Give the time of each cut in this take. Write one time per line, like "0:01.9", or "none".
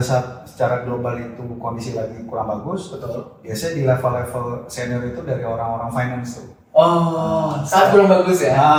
none